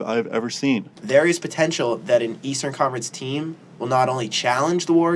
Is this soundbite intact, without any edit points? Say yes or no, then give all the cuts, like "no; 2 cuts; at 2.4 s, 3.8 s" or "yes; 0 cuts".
no; 1 cut; at 0.9 s